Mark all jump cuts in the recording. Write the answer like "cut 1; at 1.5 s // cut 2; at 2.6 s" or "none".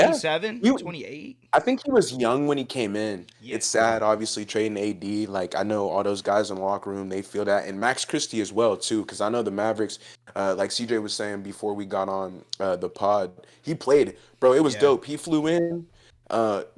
cut 1; at 3.3 s

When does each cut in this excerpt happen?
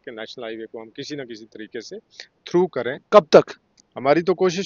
none

